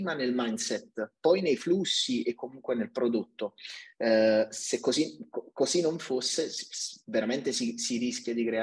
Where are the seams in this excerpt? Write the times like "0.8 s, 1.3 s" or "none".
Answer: none